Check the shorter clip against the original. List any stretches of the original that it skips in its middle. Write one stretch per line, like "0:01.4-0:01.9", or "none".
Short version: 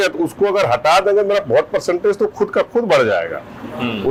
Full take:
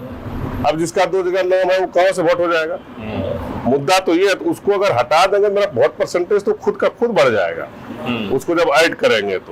none